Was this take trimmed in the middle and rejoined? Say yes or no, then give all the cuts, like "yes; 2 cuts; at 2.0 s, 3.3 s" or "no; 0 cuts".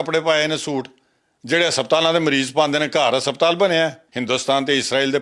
yes; 1 cut; at 4.1 s